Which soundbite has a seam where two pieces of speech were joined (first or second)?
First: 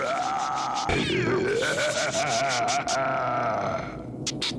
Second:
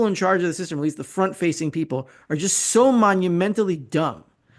first